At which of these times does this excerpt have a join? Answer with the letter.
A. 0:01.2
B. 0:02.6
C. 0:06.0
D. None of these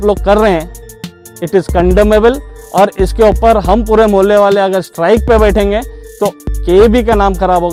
D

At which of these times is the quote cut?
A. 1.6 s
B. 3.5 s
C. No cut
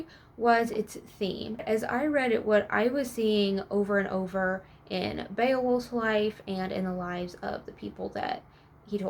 A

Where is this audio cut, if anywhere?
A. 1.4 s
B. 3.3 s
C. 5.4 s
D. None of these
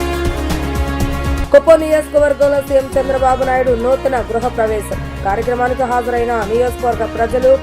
A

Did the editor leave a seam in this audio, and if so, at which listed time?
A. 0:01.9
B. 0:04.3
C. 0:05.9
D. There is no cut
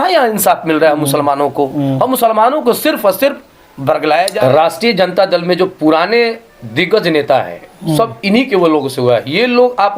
B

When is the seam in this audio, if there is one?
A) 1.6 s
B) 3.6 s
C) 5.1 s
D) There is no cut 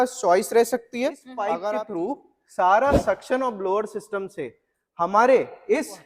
A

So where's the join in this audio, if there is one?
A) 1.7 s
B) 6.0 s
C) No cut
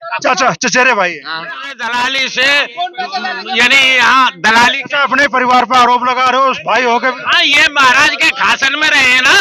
A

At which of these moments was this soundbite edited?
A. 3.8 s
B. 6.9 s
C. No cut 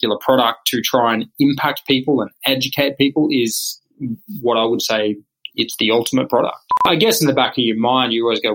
B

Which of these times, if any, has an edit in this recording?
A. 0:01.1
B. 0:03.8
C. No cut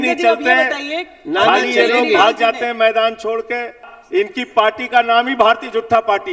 B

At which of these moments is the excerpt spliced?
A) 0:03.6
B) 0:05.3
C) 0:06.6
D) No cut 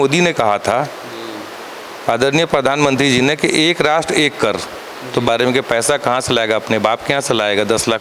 B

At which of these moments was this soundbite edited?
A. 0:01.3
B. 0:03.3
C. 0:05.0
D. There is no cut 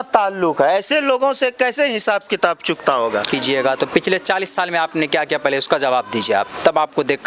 B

